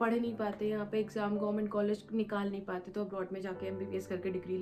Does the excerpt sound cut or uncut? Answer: uncut